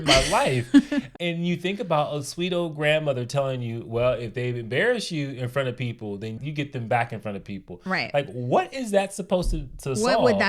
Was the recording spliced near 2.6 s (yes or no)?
no